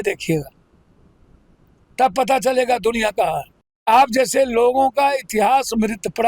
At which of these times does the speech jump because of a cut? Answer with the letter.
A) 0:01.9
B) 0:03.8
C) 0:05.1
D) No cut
B